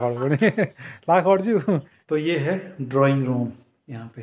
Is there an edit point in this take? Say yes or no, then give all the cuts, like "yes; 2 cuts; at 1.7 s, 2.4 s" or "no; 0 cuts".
yes; 1 cut; at 1.9 s